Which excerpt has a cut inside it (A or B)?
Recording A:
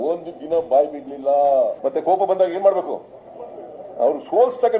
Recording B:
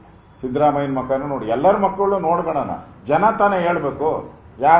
A